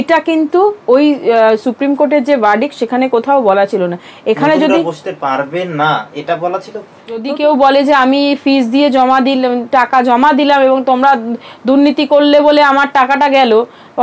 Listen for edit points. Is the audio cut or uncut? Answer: cut